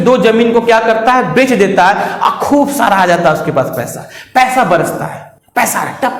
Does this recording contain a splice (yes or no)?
no